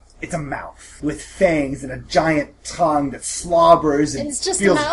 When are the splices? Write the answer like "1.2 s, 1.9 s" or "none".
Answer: 0.9 s